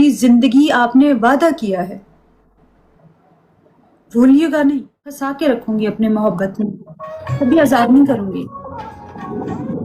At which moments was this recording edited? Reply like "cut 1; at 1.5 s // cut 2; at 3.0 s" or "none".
cut 1; at 5.3 s